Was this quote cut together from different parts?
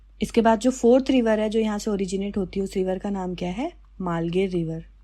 no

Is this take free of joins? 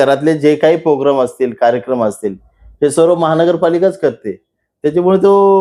yes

